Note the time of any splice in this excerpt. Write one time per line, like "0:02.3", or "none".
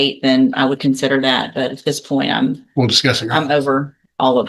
none